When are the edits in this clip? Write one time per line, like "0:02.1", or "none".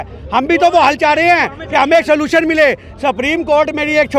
none